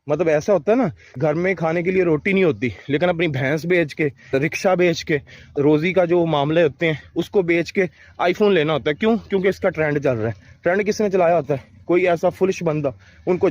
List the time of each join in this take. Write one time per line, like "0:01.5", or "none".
0:01.0
0:04.3
0:05.5

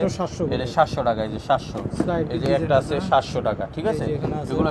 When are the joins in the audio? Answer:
none

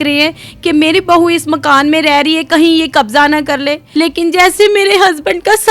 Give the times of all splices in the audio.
0:03.8

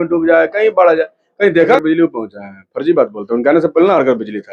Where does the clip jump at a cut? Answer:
0:01.8

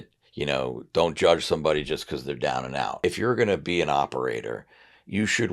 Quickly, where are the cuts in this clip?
0:03.0

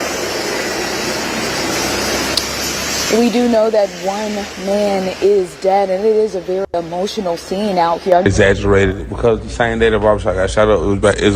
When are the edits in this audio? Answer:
0:08.2

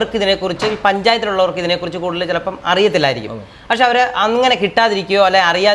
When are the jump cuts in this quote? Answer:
none

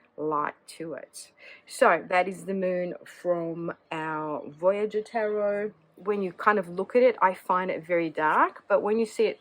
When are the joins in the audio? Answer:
0:05.9

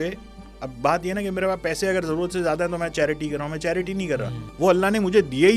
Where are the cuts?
0:04.4

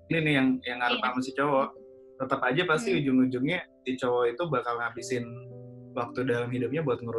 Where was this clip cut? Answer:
none

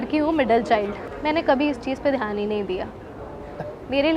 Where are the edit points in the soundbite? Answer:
0:01.1

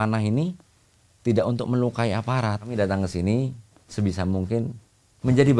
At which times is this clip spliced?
0:02.7

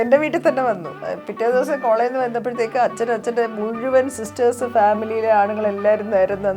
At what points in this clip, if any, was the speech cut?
0:00.9

